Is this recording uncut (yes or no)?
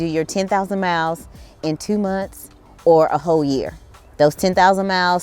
yes